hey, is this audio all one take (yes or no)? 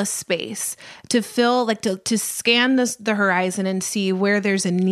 yes